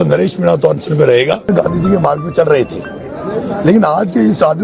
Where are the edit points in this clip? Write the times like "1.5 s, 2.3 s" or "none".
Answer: 1.5 s